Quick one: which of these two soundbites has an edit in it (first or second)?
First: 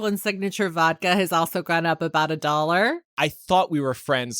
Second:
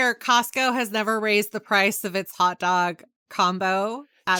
first